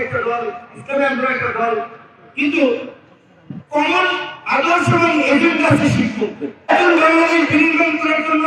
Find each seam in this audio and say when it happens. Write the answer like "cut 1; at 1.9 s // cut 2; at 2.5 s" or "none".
cut 1; at 6.7 s